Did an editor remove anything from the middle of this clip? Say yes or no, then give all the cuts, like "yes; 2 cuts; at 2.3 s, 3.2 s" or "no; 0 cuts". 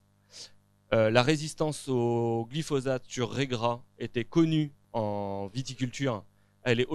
yes; 1 cut; at 4.8 s